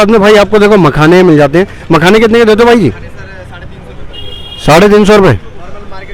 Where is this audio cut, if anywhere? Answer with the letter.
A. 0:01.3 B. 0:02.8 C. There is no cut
C